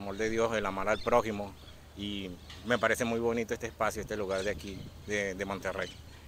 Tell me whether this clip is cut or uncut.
uncut